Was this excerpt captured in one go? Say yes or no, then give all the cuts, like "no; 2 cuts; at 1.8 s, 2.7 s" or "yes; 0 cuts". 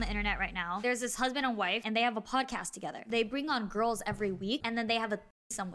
no; 4 cuts; at 0.8 s, 1.8 s, 3.0 s, 4.6 s